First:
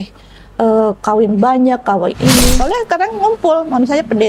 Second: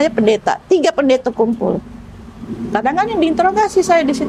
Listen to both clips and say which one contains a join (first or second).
first